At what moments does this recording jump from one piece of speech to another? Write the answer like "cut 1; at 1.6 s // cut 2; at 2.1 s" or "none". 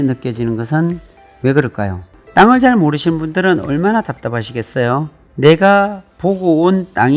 cut 1; at 2.2 s